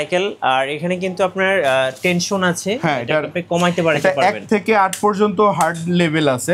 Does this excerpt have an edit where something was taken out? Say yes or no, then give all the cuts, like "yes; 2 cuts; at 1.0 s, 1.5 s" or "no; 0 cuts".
no; 0 cuts